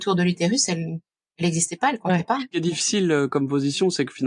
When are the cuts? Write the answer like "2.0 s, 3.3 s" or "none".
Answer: 2.6 s